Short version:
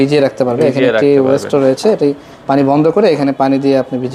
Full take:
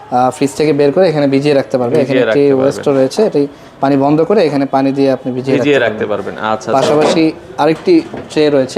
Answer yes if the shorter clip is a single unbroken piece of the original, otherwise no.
yes